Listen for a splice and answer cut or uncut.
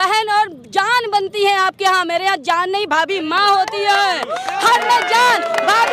uncut